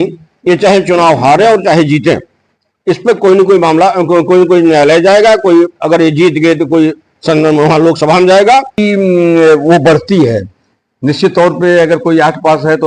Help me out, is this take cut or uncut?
cut